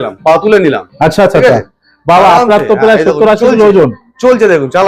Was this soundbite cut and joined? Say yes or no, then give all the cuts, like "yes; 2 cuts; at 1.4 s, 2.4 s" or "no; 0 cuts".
no; 0 cuts